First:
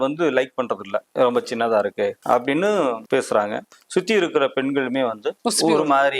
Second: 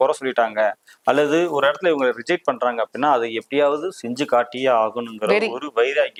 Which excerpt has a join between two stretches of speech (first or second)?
first